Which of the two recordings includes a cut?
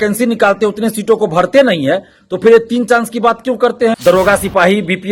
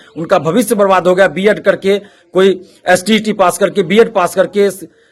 first; 1 cut; at 4.0 s

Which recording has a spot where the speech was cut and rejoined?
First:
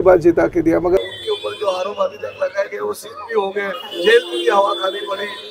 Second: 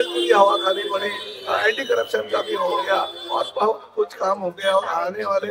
first; 1 cut; at 1.0 s

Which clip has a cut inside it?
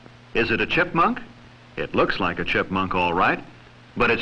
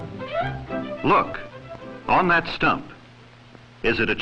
first; 1 cut; at 2.4 s

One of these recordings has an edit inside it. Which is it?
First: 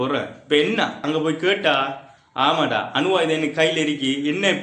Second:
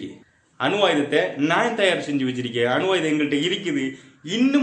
first; 1 cut; at 1.0 s

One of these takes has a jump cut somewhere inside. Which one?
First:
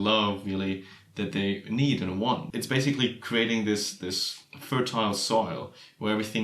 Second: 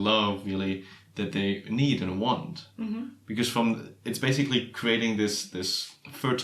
first; 1 cut; at 2.5 s

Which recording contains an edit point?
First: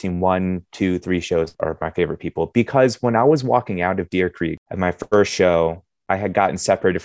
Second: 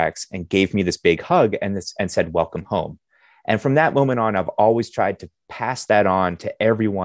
first; 2 cuts; at 1.5 s, 4.6 s

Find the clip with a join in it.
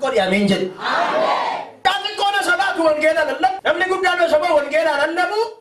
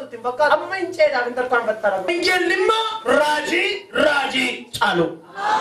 first; 1 cut; at 1.8 s

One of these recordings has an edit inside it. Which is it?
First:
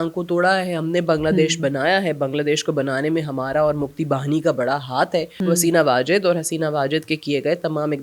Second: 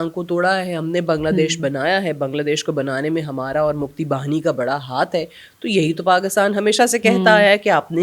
first; 1 cut; at 5.3 s

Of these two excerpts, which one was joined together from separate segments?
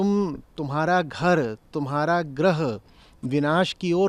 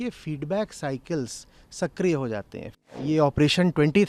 second; 1 cut; at 2.7 s

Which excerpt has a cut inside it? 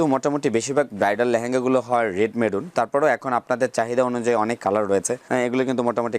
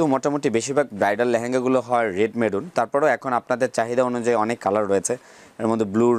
first; 1 cut; at 5.2 s

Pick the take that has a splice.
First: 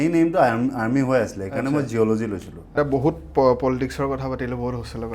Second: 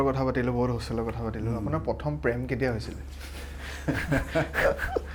first; 1 cut; at 2.7 s

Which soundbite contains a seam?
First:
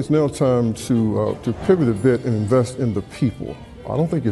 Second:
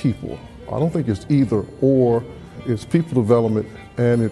second; 1 cut; at 2.6 s

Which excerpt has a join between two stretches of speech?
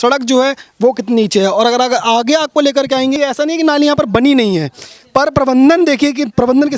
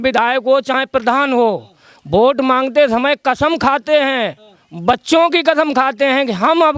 first; 1 cut; at 3.1 s

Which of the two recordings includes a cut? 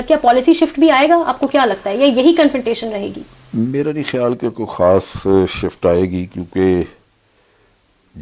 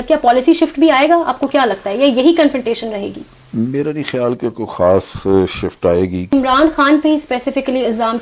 second; 1 cut; at 6.3 s

